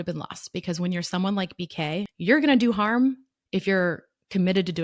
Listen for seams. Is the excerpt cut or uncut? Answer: cut